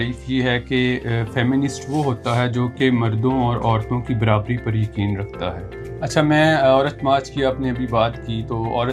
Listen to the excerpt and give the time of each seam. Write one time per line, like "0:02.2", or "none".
0:05.7